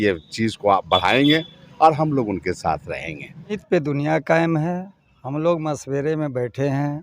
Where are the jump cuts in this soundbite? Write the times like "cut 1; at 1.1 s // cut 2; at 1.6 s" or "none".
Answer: cut 1; at 3.6 s